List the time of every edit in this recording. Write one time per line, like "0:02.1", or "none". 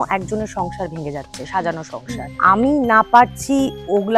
0:02.3